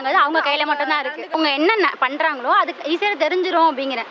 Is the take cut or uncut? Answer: uncut